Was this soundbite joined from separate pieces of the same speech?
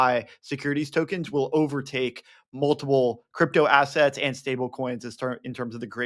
no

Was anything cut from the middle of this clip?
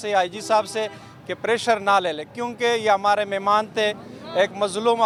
no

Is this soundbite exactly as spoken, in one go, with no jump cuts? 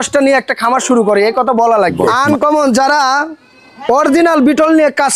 no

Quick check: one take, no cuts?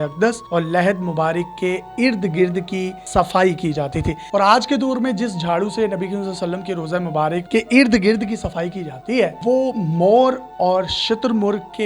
no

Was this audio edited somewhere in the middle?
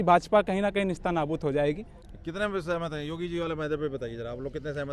no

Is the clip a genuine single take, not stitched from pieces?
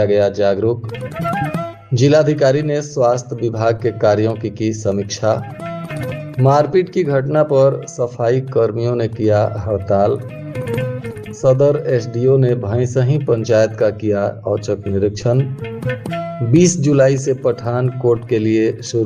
yes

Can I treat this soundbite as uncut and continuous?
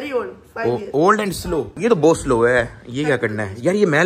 no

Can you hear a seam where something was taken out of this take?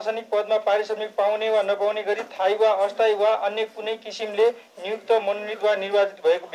no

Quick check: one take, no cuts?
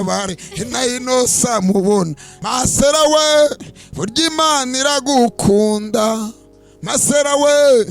no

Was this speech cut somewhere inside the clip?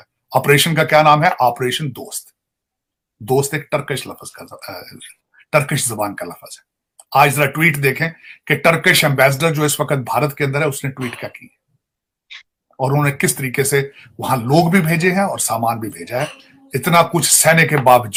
no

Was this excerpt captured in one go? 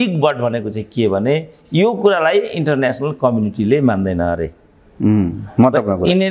yes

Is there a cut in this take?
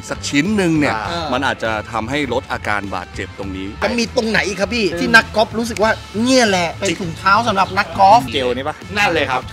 yes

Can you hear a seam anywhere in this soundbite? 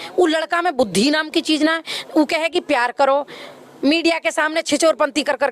no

